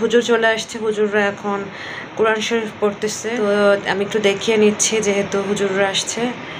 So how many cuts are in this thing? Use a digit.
1